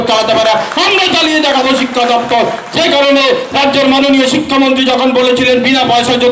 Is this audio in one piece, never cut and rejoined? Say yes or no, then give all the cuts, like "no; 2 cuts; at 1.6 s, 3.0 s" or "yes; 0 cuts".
yes; 0 cuts